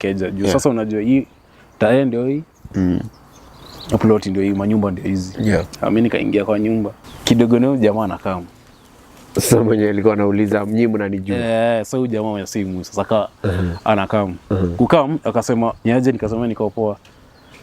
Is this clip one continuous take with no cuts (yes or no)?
no